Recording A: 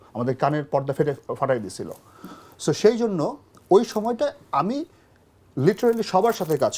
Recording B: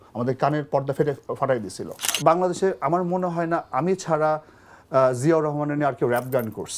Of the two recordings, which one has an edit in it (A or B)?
B